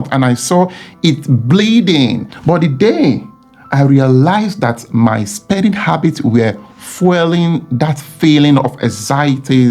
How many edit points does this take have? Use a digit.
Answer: 1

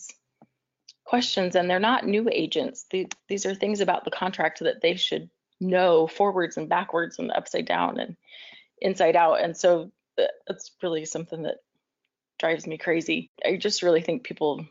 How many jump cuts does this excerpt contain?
1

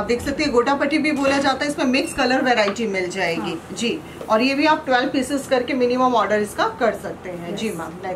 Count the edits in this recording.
0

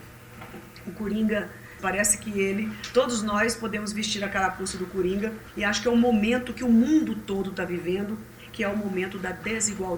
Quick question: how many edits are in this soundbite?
2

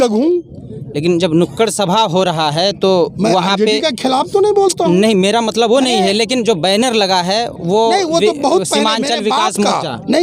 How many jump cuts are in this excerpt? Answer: 0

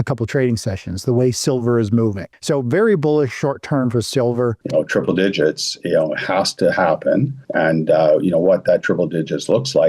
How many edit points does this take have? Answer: 3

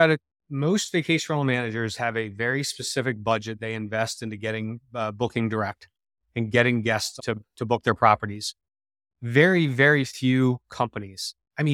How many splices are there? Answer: 1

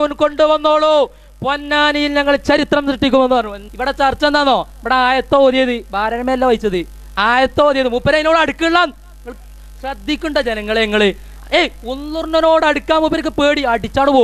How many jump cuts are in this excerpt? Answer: 1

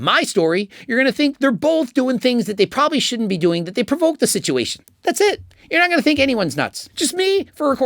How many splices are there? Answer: 1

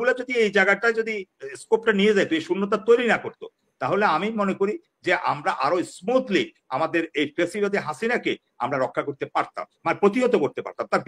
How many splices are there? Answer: 0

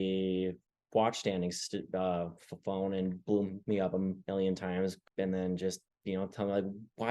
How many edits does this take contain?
2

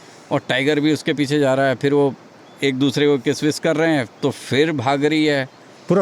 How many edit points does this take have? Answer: 0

